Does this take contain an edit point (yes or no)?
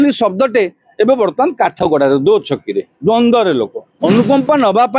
yes